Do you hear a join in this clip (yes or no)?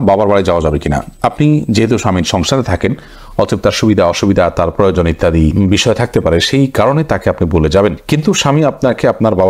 no